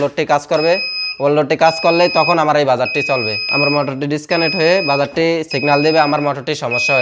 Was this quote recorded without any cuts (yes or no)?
no